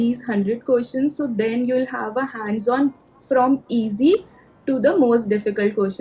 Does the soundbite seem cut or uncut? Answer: uncut